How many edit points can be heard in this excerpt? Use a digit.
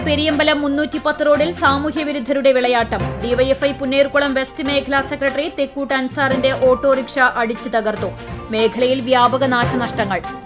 0